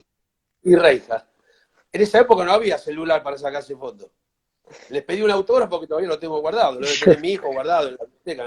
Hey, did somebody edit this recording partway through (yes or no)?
no